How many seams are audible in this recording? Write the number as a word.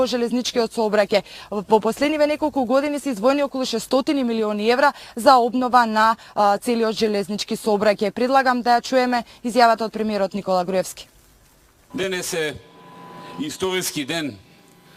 zero